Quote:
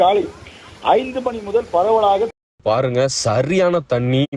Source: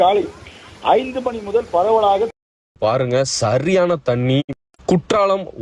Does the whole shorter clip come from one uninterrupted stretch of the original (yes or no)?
no